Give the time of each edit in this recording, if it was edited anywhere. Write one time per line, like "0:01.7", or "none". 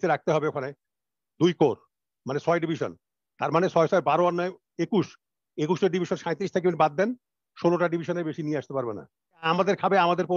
0:09.4